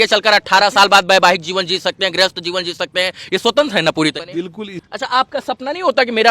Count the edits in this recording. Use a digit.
1